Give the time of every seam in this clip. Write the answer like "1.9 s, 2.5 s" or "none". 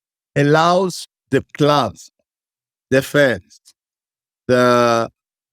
none